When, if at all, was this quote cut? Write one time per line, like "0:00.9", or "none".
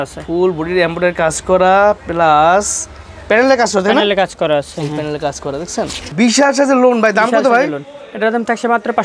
0:06.1